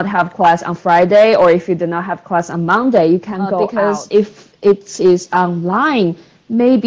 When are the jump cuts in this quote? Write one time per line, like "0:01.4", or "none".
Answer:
0:03.6